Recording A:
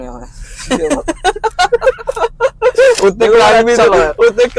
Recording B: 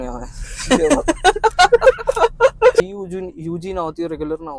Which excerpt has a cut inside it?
B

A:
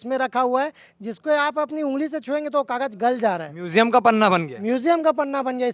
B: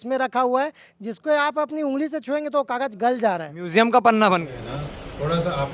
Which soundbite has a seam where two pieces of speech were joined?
B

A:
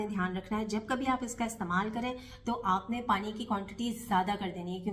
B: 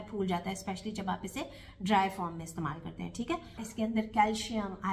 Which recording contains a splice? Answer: B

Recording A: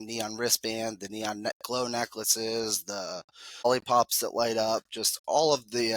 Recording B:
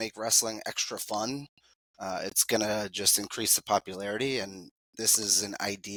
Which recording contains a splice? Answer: A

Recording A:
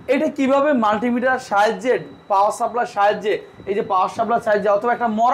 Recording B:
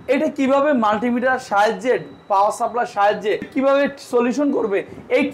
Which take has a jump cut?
B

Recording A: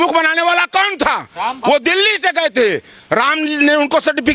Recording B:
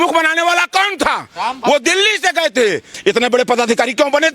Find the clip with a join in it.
B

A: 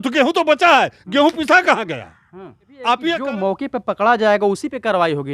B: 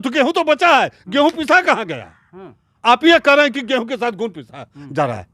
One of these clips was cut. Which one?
A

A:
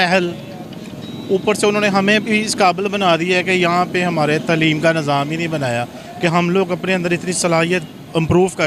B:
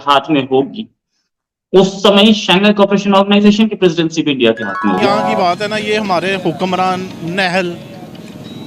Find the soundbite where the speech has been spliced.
B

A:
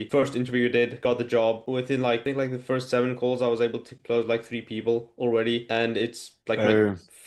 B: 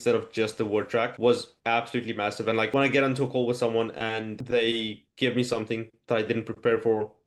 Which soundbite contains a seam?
B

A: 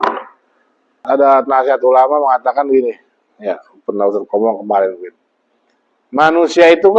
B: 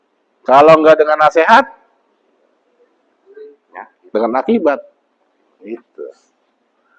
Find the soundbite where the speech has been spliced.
A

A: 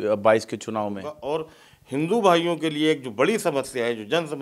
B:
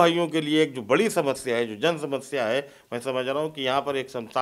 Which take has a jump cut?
A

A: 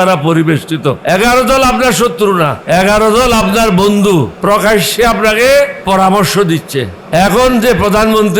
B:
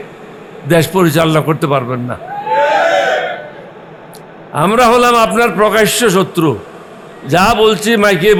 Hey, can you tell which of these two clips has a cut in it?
A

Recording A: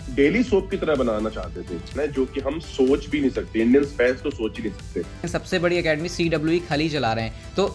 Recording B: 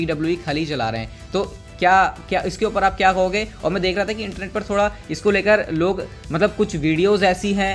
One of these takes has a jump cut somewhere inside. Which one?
A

